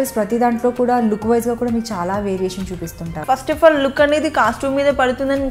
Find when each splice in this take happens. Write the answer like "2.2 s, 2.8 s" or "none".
3.2 s